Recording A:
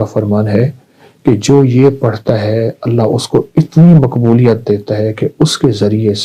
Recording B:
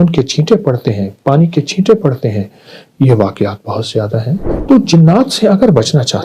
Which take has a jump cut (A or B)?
B